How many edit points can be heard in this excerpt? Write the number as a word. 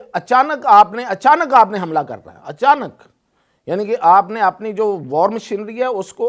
zero